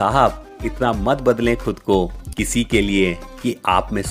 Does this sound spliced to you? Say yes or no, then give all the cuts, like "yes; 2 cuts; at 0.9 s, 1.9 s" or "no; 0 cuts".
no; 0 cuts